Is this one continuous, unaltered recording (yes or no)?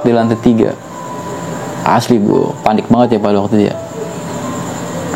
yes